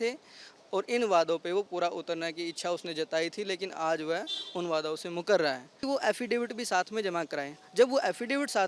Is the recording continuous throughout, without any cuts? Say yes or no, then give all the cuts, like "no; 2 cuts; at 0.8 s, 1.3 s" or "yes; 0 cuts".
no; 1 cut; at 5.8 s